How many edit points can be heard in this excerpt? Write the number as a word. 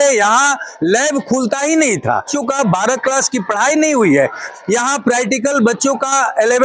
two